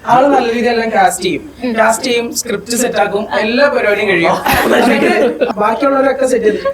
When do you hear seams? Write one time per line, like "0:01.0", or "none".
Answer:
0:05.5